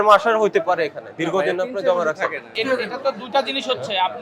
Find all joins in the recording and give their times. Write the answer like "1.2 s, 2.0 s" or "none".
2.5 s